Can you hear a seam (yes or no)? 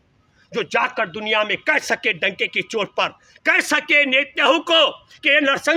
no